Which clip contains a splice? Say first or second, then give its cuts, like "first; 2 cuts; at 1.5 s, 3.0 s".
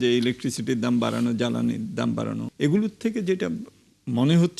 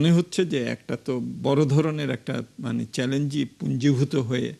first; 1 cut; at 2.5 s